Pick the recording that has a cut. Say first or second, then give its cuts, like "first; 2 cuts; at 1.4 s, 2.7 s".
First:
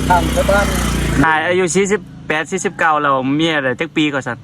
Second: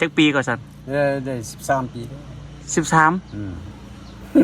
first; 1 cut; at 1.2 s